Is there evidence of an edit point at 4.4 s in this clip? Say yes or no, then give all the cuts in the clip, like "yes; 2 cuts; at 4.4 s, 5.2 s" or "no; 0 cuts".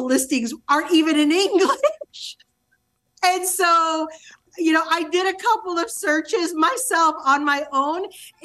yes; 1 cut; at 4.4 s